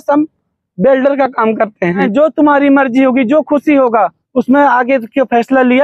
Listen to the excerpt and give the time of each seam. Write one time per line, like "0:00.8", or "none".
0:02.0
0:04.2